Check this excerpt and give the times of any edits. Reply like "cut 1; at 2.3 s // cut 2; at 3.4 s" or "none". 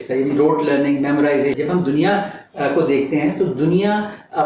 cut 1; at 1.5 s